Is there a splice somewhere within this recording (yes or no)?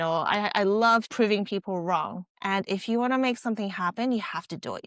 yes